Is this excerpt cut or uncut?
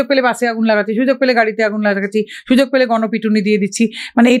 uncut